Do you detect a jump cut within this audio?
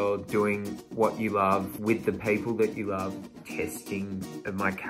yes; 1 cut; at 3.3 s

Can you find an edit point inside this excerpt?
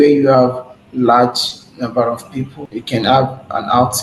yes; 1 cut; at 2.6 s

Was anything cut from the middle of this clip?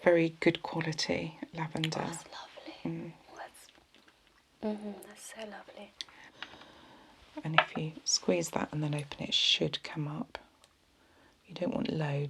yes; 1 cut; at 6.2 s

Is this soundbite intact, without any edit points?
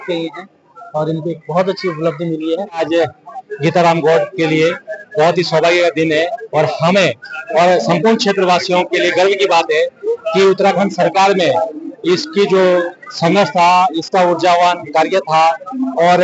no; 1 cut; at 2.8 s

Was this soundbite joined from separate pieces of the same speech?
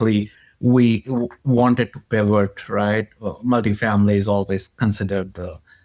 no; 0 cuts

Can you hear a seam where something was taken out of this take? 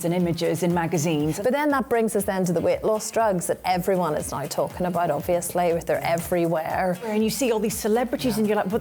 yes; 2 cuts; at 1.3 s, 7.1 s

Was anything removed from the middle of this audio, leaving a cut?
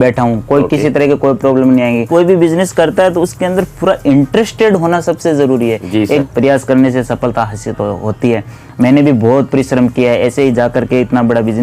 yes; 2 cuts; at 2.1 s, 6.2 s

